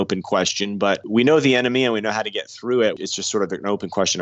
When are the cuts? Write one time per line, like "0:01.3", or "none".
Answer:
0:03.1